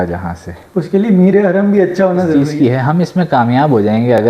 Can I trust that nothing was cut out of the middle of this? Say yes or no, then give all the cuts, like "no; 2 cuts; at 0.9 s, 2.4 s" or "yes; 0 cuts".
no; 1 cut; at 2.3 s